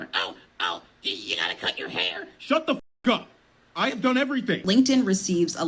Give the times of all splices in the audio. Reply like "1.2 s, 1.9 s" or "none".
4.6 s